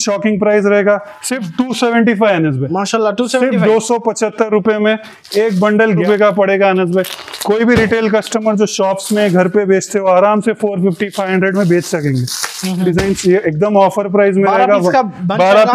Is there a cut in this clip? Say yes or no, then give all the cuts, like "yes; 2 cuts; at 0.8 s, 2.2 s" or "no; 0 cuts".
yes; 2 cuts; at 6.0 s, 12.8 s